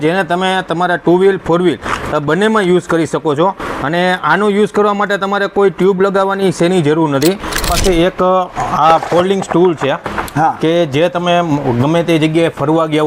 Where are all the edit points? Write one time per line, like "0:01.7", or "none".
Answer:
0:07.7